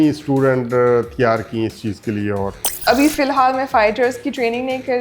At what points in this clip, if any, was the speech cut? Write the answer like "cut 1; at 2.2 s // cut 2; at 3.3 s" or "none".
cut 1; at 2.7 s